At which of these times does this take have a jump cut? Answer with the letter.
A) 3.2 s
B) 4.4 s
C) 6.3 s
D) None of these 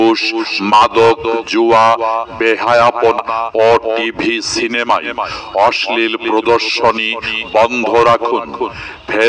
A